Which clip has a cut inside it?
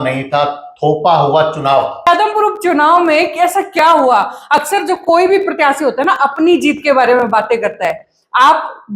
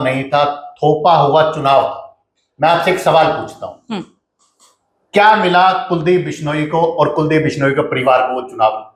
first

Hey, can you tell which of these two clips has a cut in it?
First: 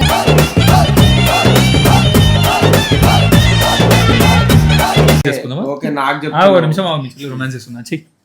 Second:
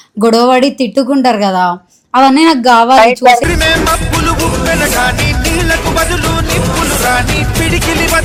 first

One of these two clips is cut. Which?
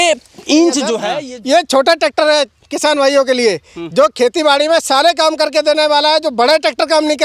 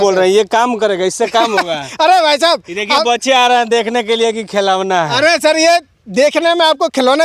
first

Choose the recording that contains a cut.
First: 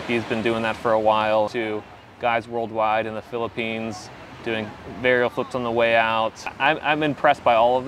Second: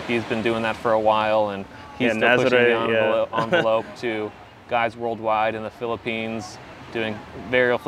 first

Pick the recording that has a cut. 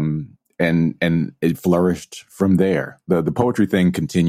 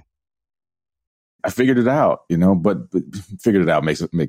second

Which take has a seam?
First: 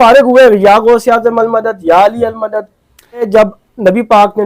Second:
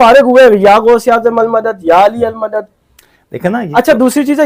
first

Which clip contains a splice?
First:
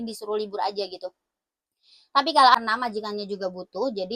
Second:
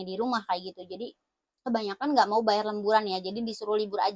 first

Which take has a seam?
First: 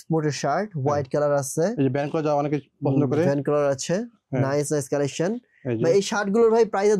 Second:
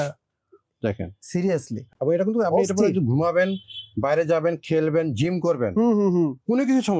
second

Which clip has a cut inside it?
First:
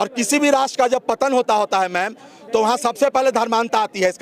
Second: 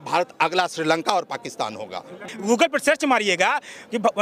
second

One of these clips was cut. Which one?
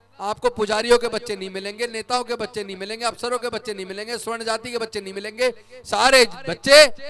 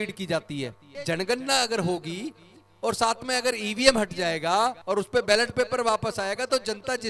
second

